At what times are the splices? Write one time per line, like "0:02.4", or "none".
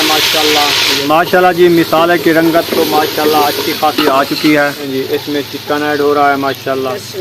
0:01.0
0:04.9